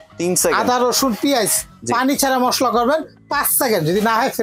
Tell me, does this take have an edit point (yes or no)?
no